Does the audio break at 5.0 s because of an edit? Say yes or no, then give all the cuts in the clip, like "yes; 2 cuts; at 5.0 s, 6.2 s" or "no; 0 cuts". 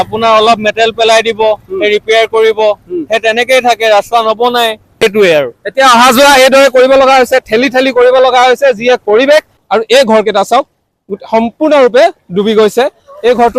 yes; 2 cuts; at 5.0 s, 9.6 s